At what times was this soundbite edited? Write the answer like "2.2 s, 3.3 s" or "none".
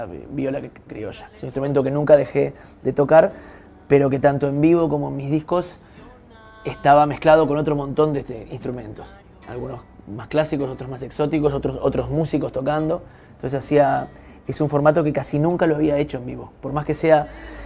none